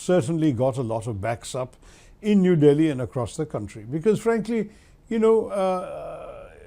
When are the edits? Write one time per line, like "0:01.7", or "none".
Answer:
none